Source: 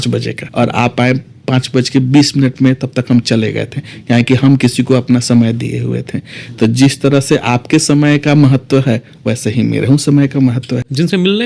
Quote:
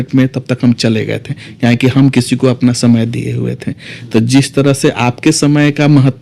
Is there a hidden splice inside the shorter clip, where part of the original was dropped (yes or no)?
no